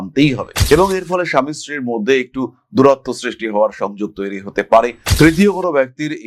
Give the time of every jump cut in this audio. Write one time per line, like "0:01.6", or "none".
none

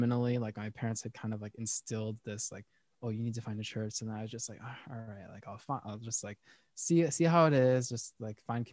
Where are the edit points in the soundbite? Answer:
none

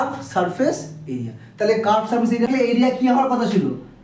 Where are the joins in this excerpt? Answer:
0:02.5

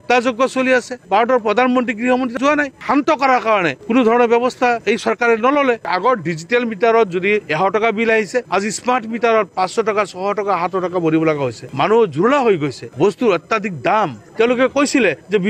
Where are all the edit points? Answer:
0:01.0
0:02.8
0:05.8

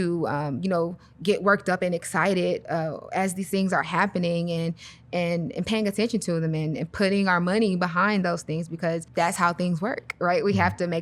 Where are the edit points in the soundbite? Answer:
0:09.1

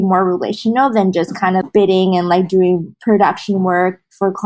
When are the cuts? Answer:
0:01.6
0:02.9

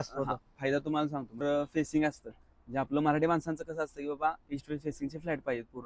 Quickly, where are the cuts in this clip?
0:01.3

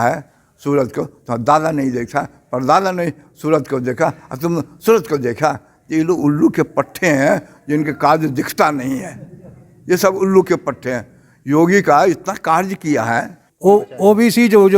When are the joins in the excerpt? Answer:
0:13.4

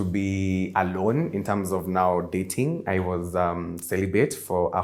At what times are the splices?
none

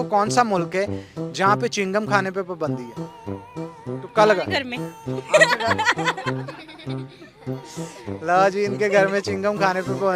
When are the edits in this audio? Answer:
none

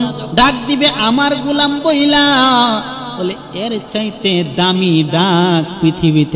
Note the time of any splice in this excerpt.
none

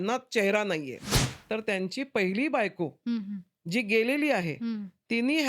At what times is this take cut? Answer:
0:01.0

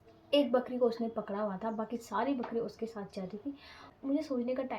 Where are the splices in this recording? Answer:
0:03.8

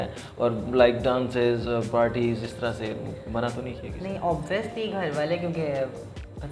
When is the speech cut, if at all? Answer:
none

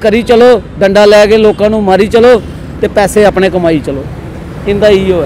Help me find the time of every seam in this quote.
none

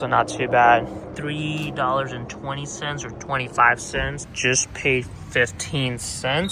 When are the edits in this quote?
0:04.2

